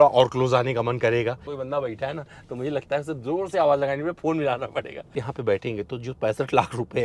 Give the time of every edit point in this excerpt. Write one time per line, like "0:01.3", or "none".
0:01.5
0:05.1